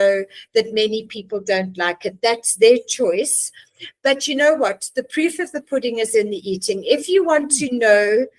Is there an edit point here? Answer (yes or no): no